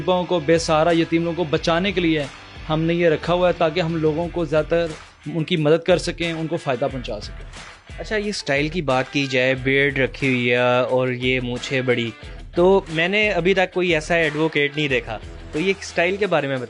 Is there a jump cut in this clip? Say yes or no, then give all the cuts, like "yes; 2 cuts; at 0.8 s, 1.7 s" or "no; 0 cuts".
no; 0 cuts